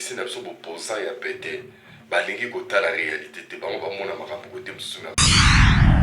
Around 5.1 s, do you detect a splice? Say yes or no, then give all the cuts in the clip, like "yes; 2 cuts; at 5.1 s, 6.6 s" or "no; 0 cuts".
yes; 1 cut; at 5.1 s